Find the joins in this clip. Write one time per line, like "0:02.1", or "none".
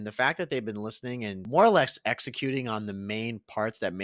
0:01.4